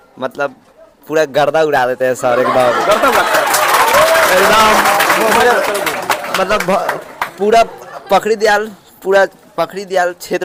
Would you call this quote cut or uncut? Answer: uncut